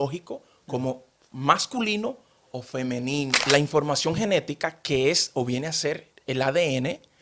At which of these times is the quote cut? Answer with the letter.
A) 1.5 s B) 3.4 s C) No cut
B